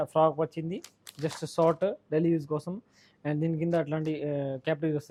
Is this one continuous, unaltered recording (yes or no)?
yes